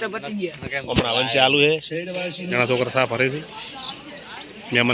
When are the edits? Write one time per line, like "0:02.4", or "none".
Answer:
0:02.5